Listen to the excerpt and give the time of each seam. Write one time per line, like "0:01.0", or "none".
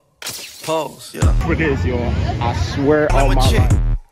0:01.4